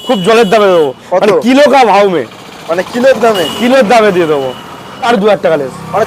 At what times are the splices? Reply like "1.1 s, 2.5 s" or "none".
5.1 s